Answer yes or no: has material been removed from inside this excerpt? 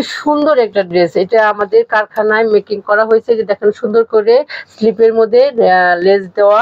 no